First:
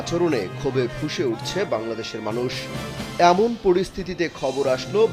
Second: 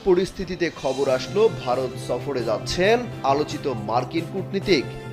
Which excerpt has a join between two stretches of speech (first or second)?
first